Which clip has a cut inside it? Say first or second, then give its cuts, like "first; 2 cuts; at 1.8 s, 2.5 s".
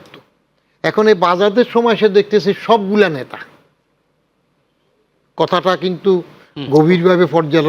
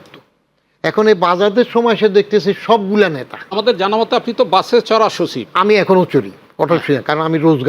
second; 1 cut; at 3.5 s